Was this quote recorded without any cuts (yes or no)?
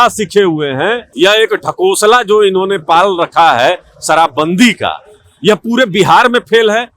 no